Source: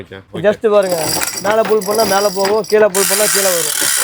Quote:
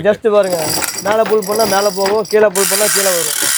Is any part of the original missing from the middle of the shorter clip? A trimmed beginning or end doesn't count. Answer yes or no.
no